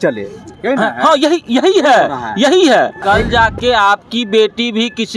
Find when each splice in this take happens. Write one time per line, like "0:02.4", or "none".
0:03.0